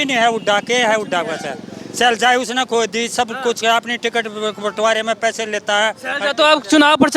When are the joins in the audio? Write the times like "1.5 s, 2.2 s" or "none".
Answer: none